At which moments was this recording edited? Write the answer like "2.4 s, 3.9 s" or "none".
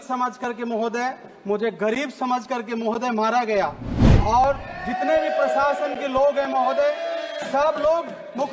none